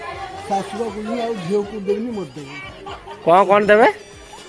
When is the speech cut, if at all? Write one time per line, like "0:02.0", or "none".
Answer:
0:02.8